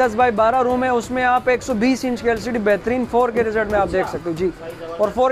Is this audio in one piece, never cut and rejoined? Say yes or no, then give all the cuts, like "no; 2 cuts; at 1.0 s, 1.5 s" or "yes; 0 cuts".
yes; 0 cuts